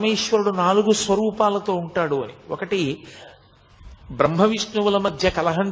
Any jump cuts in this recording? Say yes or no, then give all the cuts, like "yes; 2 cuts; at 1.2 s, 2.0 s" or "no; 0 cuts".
no; 0 cuts